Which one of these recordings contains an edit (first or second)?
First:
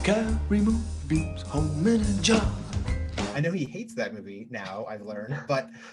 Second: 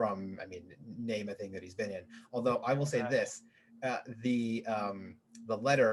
first